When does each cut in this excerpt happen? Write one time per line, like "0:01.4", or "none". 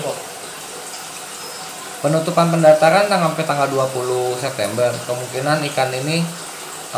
none